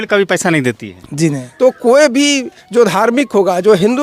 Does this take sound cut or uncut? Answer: cut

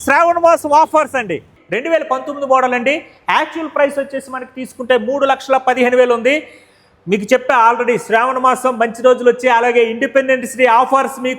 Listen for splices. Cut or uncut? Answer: cut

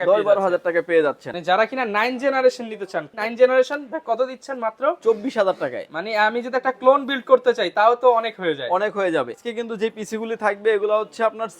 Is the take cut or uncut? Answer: cut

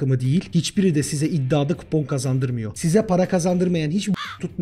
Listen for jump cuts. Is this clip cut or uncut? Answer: uncut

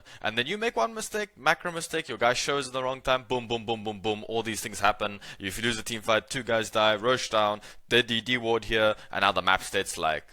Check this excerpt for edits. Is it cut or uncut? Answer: uncut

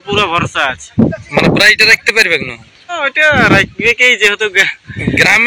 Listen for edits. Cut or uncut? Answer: cut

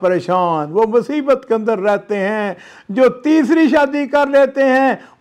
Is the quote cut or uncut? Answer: uncut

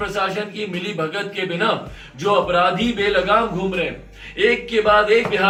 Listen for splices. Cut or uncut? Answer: uncut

